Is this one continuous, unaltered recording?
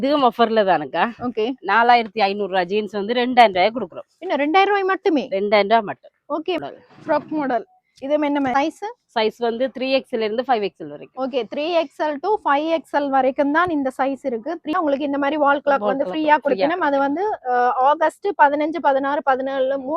no; 3 cuts; at 6.6 s, 8.5 s, 14.7 s

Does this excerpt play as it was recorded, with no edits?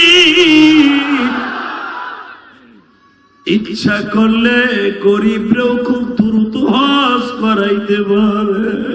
yes; 0 cuts

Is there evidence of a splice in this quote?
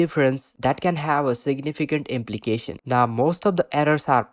yes; 1 cut; at 2.7 s

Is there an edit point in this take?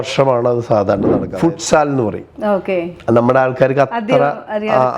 yes; 1 cut; at 1.2 s

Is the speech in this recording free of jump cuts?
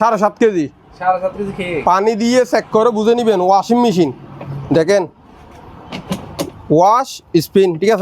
yes; 0 cuts

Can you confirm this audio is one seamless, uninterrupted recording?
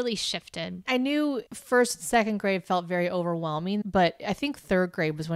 no; 2 cuts; at 0.9 s, 3.8 s

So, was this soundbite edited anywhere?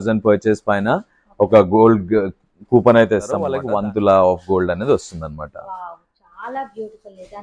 yes; 1 cut; at 3.5 s

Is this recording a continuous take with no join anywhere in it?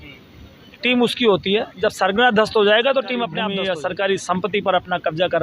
no; 1 cut; at 3.4 s

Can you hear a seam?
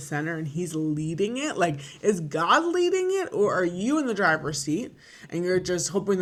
no; 0 cuts

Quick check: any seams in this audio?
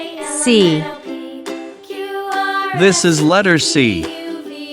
yes; 3 cuts; at 0.8 s, 2.8 s, 4.0 s

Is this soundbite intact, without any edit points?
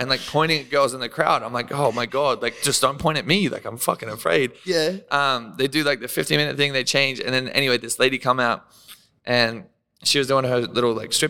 yes; 0 cuts

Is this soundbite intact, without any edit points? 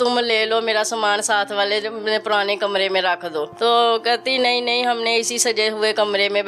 no; 1 cut; at 3.5 s

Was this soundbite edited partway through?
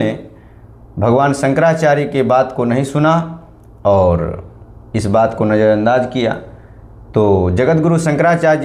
no; 0 cuts

